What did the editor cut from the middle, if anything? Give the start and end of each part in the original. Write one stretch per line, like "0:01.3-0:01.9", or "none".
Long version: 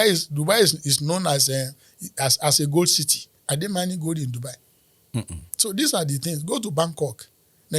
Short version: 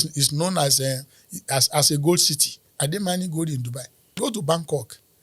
0:04.8-0:06.4